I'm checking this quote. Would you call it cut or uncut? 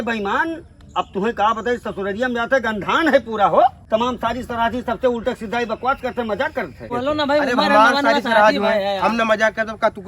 cut